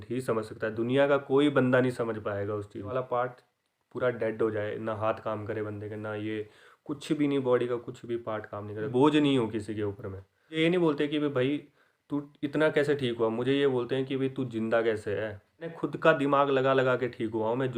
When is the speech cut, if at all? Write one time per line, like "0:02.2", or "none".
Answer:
0:02.9
0:08.9
0:10.6
0:15.8